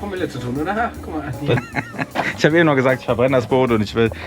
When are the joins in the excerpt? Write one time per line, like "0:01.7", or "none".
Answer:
0:01.6